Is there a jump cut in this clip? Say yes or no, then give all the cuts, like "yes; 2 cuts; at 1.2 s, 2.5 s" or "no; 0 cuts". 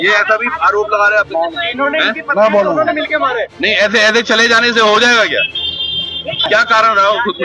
yes; 1 cut; at 6.5 s